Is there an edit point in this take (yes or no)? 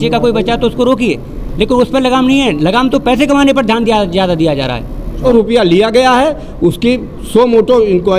yes